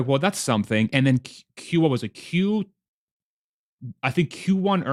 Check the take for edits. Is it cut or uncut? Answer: uncut